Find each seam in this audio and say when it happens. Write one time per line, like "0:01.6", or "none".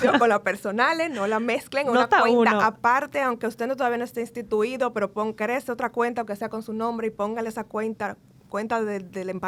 none